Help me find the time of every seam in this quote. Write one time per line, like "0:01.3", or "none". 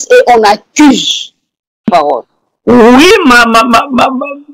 0:01.9